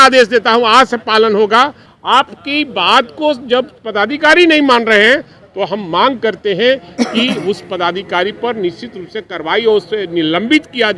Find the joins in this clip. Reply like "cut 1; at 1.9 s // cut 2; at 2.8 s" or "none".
cut 1; at 1.9 s

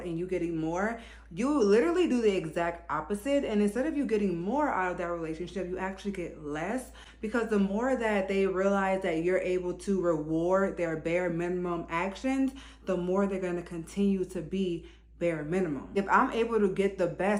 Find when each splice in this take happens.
none

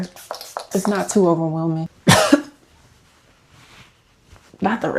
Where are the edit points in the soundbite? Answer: cut 1; at 1.9 s

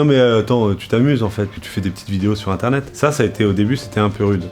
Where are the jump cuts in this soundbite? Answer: cut 1; at 2.9 s

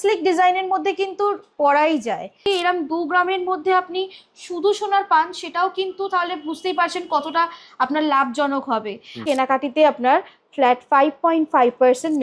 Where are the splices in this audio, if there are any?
cut 1; at 2.4 s // cut 2; at 9.2 s

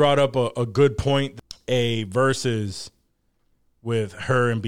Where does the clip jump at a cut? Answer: cut 1; at 1.3 s

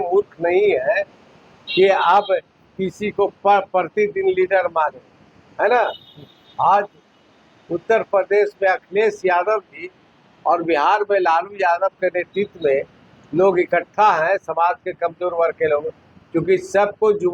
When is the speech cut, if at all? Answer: none

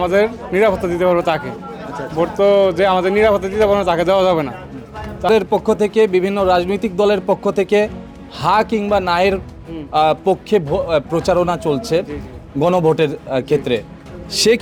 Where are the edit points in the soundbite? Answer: none

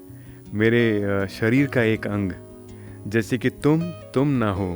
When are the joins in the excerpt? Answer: none

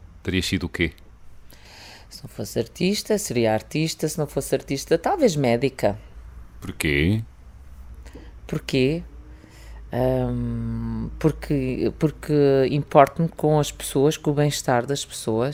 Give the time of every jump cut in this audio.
none

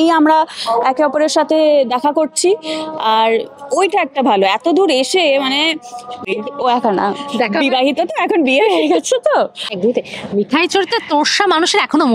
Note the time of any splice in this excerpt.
cut 1; at 6.3 s // cut 2; at 9.7 s

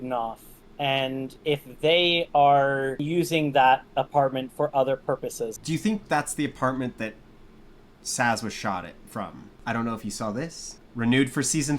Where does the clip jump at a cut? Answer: cut 1; at 1.3 s // cut 2; at 3.0 s // cut 3; at 5.5 s // cut 4; at 9.5 s

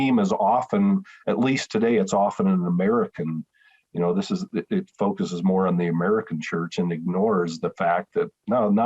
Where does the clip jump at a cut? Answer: none

